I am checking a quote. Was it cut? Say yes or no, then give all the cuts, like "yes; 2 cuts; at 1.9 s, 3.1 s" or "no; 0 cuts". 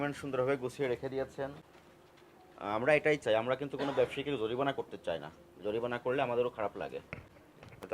yes; 1 cut; at 1.6 s